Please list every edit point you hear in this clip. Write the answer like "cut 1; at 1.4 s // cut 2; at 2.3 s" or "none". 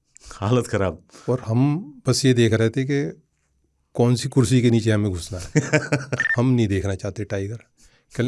cut 1; at 6.2 s